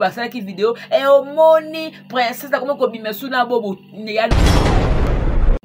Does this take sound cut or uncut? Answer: cut